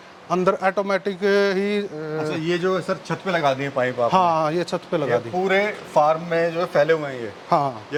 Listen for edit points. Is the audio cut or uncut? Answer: uncut